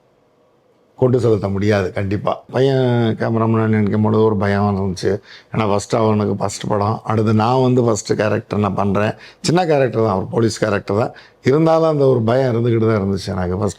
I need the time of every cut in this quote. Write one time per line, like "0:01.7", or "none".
0:02.5